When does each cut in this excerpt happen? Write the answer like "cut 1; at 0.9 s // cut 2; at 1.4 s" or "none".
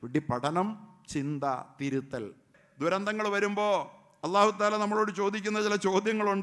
cut 1; at 2.6 s